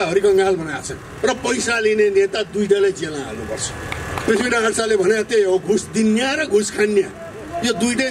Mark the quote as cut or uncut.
cut